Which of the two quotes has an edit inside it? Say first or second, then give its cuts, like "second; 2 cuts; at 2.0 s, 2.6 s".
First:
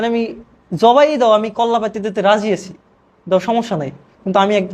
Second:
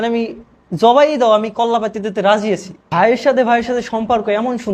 second; 1 cut; at 2.8 s